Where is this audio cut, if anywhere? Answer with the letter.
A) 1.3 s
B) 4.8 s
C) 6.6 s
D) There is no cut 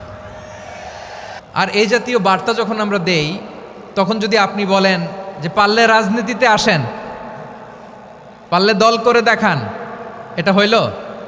A